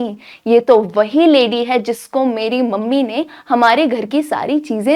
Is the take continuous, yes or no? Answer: yes